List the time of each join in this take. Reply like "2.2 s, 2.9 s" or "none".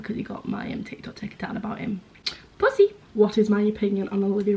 3.0 s